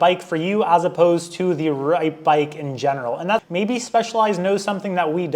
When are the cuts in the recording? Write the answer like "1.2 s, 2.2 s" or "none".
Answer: 3.5 s